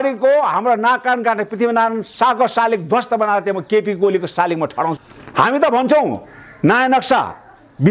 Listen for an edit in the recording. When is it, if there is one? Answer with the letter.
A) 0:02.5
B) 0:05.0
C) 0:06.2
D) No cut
B